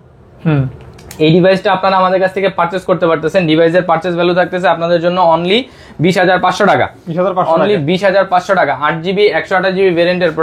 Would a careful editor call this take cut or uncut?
uncut